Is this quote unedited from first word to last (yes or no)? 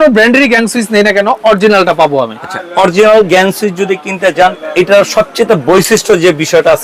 yes